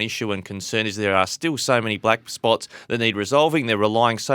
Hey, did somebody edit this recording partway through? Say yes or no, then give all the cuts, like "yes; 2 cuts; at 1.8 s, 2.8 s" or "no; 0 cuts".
no; 0 cuts